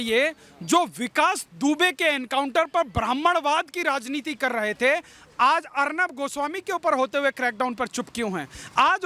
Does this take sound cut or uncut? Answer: uncut